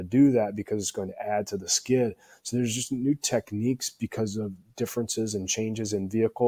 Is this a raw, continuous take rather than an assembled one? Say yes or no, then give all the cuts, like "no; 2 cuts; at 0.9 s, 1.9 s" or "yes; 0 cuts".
yes; 0 cuts